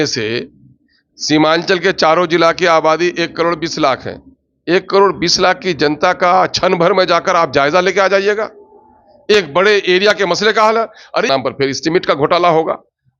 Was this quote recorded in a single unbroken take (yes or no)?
no